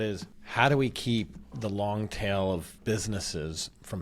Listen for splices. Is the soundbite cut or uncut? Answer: uncut